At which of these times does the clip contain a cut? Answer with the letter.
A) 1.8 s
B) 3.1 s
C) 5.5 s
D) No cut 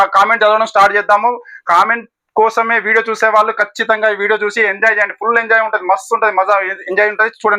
D